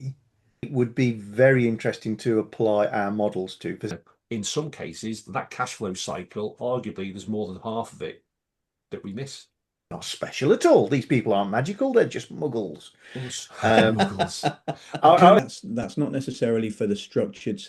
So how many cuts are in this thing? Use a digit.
3